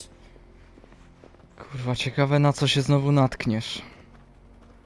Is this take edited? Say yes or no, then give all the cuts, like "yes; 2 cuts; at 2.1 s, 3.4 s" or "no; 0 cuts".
no; 0 cuts